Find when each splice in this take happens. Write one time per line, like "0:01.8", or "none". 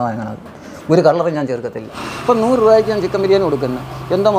0:02.0